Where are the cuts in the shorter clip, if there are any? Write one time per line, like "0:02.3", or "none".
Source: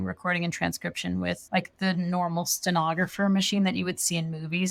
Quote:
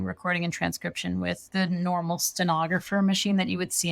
0:01.4